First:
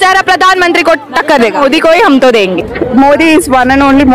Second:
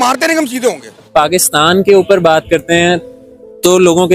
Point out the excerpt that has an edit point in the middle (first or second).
second